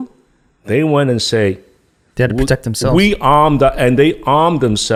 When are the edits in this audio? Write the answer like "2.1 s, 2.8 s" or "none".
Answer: none